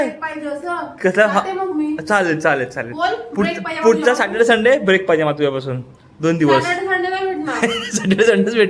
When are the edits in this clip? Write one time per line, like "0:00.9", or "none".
none